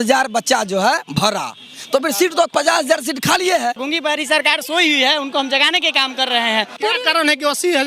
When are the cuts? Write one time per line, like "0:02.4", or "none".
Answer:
0:03.8
0:06.8